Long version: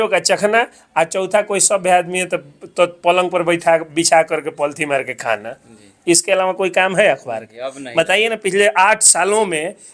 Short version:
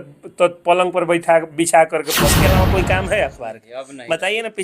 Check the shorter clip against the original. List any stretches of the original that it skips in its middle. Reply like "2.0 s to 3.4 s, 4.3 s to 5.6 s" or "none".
4.7 s to 6.2 s